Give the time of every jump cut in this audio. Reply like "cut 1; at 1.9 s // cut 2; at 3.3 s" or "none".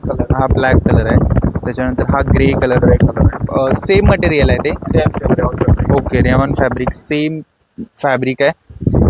none

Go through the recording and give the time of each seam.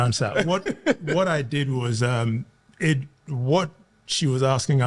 none

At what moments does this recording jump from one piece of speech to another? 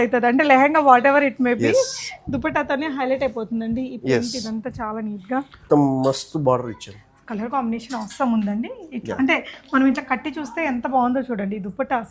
cut 1; at 5.6 s

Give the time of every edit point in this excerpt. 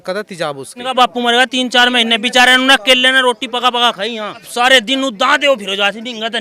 cut 1; at 0.9 s // cut 2; at 4.5 s

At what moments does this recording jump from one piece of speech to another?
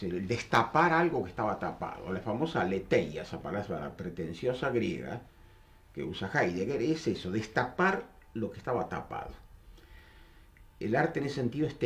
none

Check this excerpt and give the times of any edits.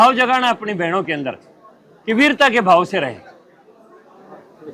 none

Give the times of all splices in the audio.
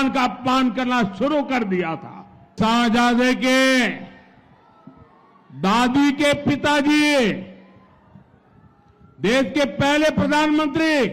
cut 1; at 2.5 s

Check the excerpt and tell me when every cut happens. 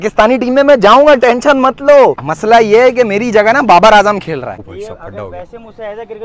cut 1; at 4.5 s

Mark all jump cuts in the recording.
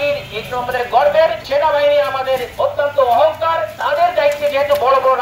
cut 1; at 1.4 s // cut 2; at 2.5 s // cut 3; at 3.7 s

